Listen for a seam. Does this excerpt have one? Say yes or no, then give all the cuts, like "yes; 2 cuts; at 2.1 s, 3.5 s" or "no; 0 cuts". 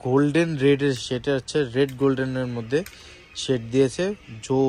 no; 0 cuts